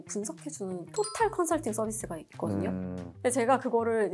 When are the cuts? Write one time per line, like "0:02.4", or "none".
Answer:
0:03.2